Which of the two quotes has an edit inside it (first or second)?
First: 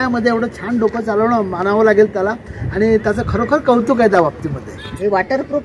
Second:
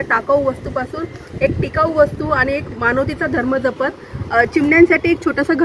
first